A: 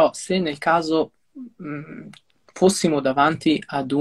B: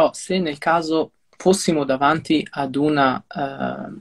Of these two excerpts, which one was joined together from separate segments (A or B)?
B